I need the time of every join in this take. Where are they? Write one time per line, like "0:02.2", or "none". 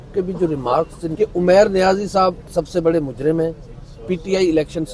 0:01.0
0:02.5